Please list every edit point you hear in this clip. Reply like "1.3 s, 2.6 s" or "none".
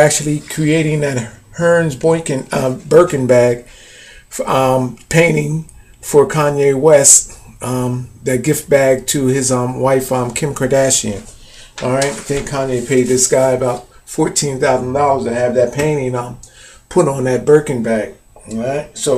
none